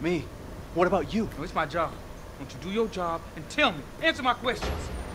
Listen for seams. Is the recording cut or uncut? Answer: uncut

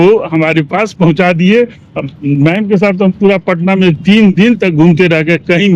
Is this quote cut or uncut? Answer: uncut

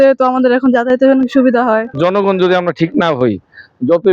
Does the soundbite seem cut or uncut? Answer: cut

